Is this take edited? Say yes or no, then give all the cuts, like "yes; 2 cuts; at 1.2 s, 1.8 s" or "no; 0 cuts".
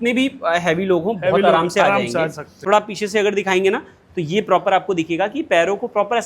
yes; 1 cut; at 2.5 s